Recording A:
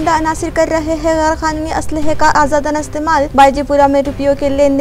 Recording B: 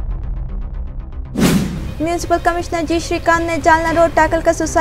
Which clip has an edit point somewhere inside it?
B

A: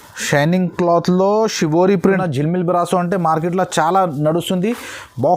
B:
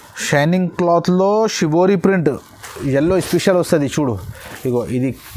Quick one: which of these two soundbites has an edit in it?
A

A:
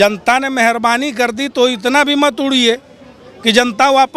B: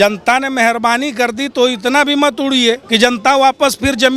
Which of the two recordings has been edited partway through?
B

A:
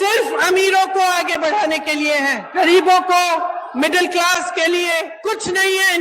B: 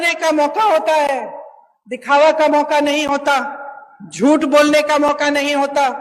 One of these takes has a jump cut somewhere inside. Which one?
A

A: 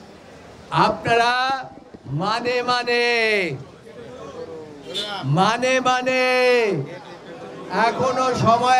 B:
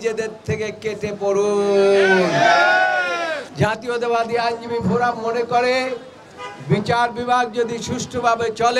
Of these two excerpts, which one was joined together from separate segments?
B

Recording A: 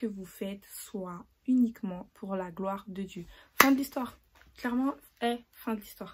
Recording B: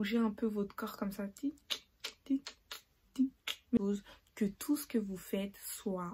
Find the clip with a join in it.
B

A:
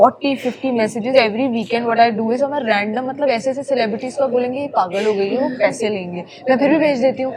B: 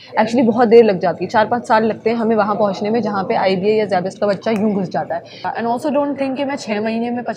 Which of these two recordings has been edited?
B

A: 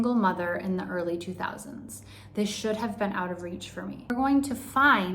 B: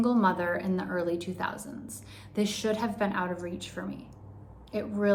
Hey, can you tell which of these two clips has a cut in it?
A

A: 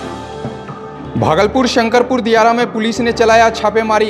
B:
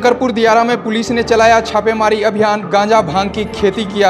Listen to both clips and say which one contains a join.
A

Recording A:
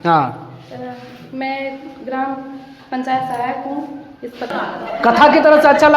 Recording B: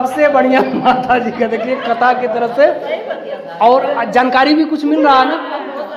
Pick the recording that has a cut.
A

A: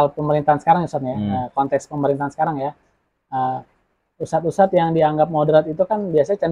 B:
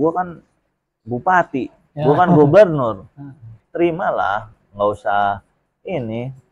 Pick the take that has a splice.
B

